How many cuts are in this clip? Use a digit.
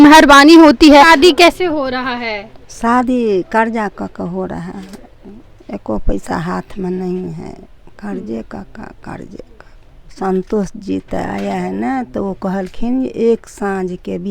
2